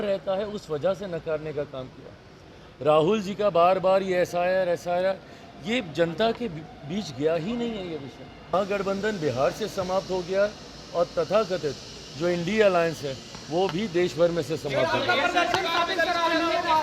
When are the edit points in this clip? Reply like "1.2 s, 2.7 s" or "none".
8.5 s